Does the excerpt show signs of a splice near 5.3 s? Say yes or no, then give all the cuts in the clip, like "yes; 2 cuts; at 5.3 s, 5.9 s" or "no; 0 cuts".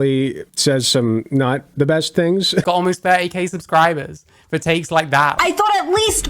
yes; 2 cuts; at 2.6 s, 5.3 s